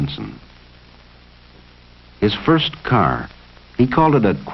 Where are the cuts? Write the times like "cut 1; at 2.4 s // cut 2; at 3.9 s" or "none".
cut 1; at 3.5 s